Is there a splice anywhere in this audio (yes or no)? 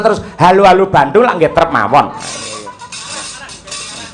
no